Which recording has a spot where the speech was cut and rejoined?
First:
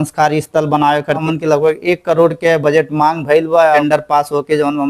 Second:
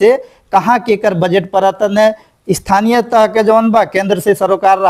first; 2 cuts; at 1.2 s, 3.8 s

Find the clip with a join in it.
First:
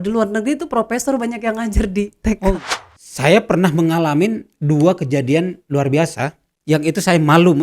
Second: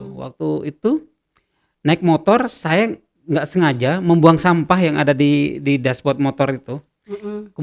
first; 1 cut; at 2.5 s

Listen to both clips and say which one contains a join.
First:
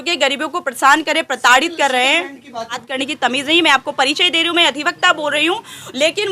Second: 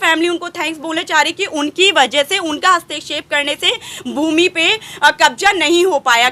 first; 1 cut; at 2.8 s

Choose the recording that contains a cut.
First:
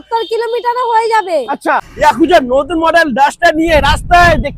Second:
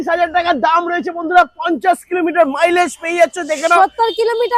first; 1 cut; at 1.9 s

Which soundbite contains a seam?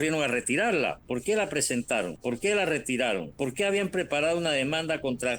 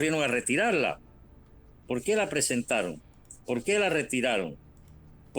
first; 3 cuts; at 1.0 s, 2.1 s, 3.3 s

